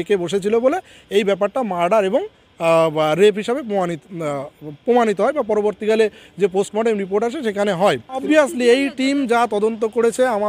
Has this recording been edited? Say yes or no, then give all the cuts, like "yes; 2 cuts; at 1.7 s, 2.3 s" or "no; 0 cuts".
yes; 1 cut; at 8.2 s